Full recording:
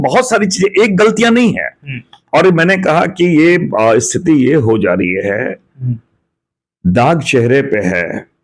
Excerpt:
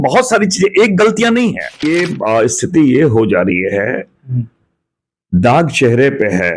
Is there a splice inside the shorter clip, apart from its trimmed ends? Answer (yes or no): yes